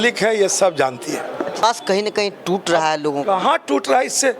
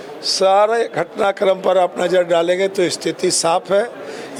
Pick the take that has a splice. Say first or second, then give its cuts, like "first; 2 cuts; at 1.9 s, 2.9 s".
first; 1 cut; at 1.6 s